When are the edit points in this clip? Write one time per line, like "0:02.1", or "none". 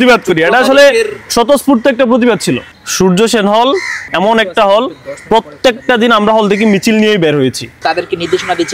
0:02.7
0:04.0
0:07.8